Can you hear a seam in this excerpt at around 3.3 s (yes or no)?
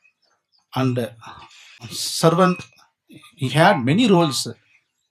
no